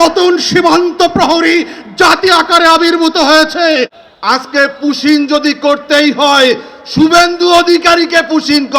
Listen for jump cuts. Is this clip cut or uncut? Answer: cut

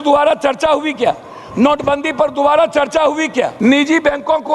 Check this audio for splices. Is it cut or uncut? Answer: cut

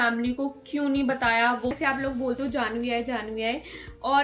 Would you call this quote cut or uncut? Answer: cut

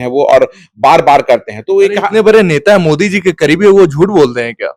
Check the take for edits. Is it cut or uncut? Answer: uncut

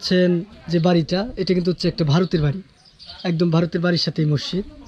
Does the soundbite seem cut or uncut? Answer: uncut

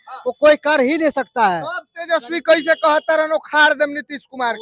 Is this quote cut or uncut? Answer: uncut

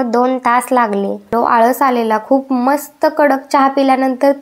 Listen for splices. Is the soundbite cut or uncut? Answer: cut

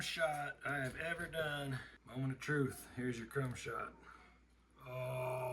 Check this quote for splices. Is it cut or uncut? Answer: cut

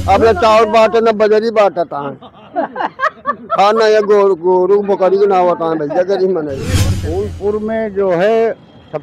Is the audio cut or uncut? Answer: cut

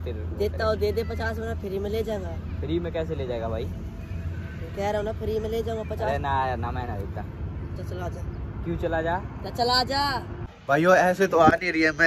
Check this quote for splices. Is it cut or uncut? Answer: cut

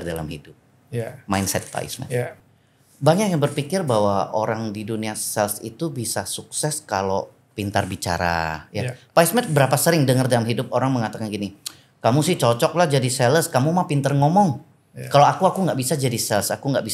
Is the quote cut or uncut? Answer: cut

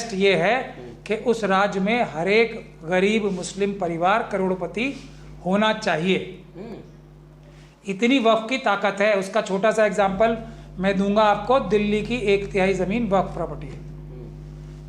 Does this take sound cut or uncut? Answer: uncut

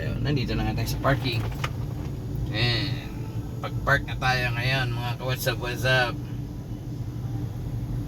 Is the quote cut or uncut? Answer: uncut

